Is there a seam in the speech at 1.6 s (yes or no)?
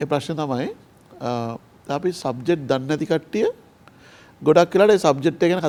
no